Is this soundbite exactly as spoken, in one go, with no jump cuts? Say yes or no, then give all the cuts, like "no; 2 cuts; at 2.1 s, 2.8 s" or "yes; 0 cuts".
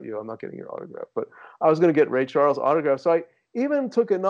yes; 0 cuts